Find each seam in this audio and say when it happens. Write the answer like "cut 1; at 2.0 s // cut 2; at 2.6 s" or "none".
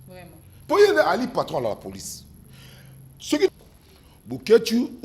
cut 1; at 3.5 s